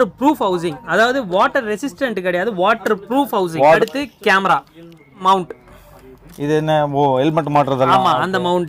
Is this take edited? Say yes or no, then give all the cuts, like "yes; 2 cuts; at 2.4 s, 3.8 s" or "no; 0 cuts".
yes; 2 cuts; at 3.8 s, 5.2 s